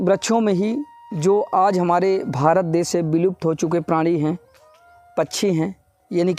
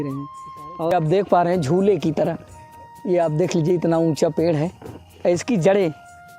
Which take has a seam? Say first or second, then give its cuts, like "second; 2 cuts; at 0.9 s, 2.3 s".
second; 1 cut; at 0.9 s